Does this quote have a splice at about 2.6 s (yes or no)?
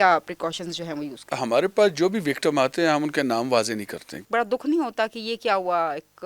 no